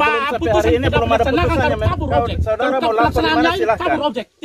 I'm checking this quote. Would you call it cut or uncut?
uncut